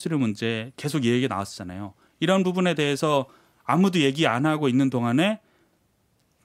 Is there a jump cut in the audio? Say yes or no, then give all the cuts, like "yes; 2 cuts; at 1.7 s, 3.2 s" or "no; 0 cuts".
no; 0 cuts